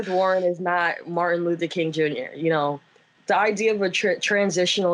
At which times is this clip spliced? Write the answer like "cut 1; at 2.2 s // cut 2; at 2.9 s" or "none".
none